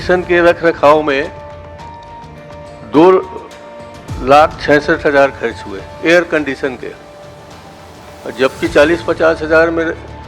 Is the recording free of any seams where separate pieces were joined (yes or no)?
yes